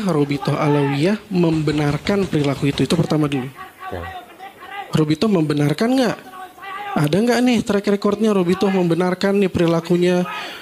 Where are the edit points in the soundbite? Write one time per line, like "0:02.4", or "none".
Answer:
none

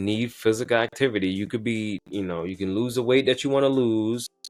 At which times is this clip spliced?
none

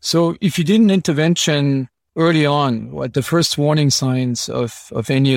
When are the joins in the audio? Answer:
0:02.0

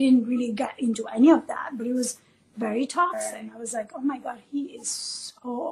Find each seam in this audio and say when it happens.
0:03.1

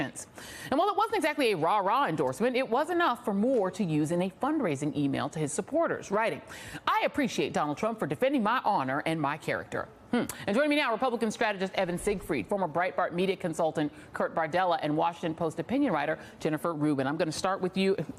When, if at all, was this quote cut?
none

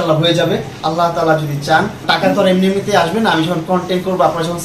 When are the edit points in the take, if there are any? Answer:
0:02.0

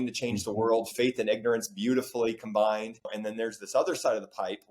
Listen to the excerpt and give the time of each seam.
0:03.2

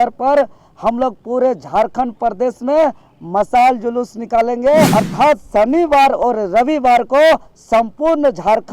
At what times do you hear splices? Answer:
0:04.9

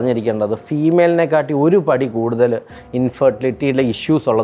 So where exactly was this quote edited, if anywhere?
none

